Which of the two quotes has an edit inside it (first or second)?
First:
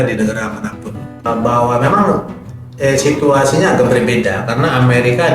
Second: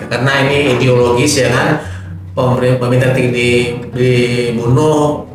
first